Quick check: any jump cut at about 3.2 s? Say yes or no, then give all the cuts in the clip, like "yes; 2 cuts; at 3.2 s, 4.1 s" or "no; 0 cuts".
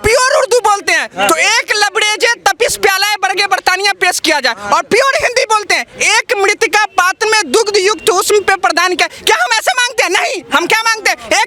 no; 0 cuts